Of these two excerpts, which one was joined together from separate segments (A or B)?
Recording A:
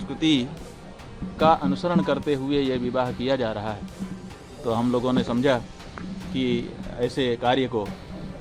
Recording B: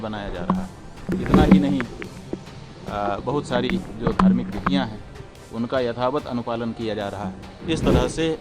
B